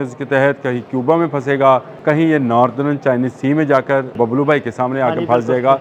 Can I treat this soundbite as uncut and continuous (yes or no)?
no